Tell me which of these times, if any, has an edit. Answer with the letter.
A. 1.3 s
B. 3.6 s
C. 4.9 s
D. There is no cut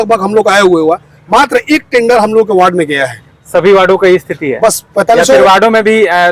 D